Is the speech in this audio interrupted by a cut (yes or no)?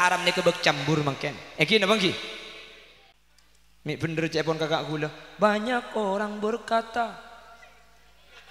yes